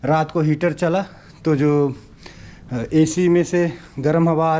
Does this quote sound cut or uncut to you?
uncut